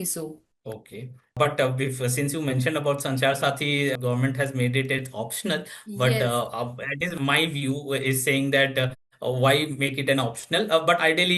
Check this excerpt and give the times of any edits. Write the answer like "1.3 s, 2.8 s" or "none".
1.4 s, 3.9 s